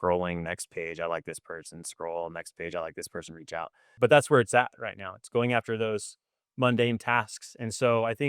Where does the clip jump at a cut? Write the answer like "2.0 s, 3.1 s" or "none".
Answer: 4.0 s